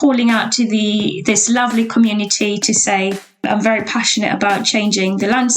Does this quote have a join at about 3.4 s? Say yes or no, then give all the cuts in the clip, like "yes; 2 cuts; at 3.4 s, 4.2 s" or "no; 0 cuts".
yes; 1 cut; at 3.4 s